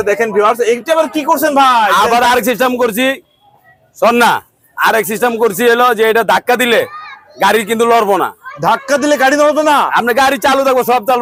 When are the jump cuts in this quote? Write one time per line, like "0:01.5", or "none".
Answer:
none